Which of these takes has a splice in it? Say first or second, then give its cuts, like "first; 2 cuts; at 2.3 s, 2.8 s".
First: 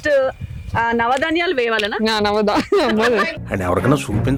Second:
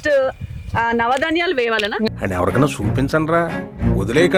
second; 1 cut; at 2.1 s